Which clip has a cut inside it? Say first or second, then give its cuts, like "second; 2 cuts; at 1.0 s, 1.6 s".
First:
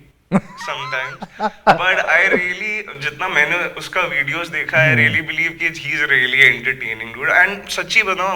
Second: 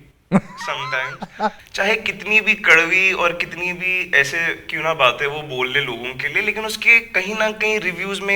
second; 1 cut; at 1.6 s